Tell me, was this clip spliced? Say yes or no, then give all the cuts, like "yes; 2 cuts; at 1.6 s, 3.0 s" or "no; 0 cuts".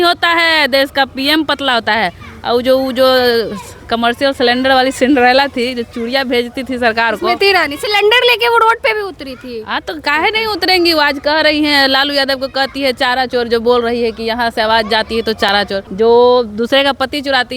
yes; 1 cut; at 15.8 s